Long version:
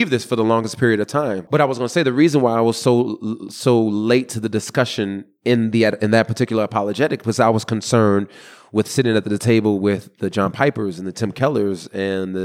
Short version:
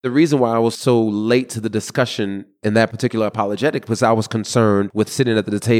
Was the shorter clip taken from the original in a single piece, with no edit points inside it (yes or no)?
no